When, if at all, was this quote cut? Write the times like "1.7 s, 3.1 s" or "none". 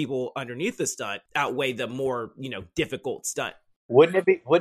1.2 s, 3.8 s

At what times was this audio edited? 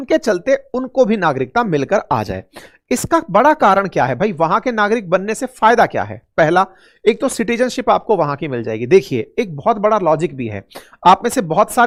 none

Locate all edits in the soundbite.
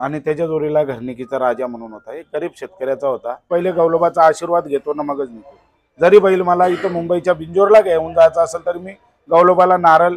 3.4 s

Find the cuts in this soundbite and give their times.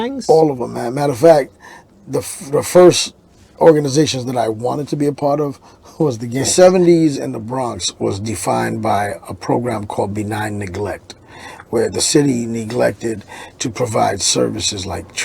6.5 s

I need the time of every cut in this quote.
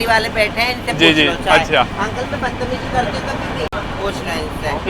none

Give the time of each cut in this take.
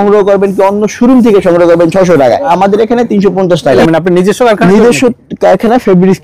2.5 s, 3.8 s

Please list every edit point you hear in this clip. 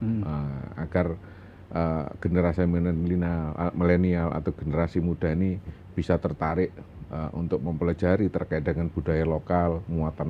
none

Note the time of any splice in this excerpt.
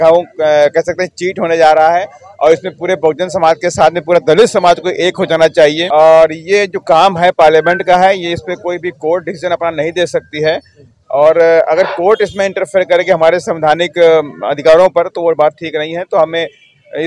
5.8 s

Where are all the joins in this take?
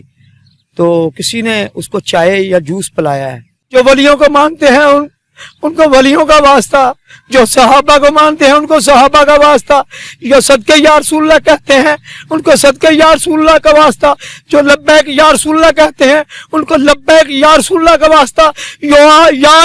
3.5 s

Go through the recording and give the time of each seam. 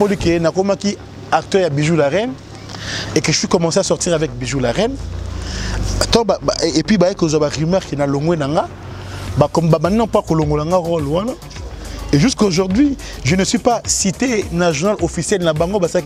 none

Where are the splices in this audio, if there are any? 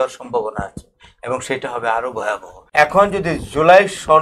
2.5 s

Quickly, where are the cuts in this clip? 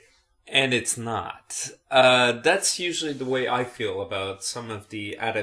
none

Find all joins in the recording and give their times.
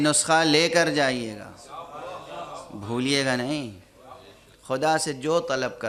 none

